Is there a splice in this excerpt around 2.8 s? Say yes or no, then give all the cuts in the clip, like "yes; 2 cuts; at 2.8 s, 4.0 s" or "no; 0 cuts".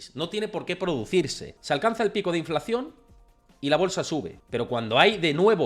no; 2 cuts; at 1.5 s, 4.4 s